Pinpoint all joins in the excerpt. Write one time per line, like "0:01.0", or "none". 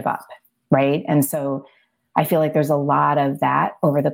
none